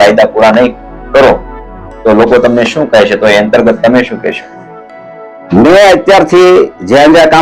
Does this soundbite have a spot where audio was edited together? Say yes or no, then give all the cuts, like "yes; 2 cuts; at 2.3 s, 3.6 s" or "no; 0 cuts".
no; 0 cuts